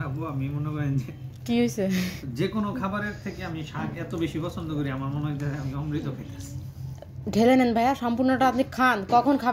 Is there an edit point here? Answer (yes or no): no